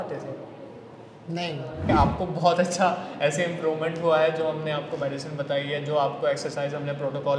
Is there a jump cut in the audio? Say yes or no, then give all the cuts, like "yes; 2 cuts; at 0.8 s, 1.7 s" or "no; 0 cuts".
yes; 1 cut; at 1.8 s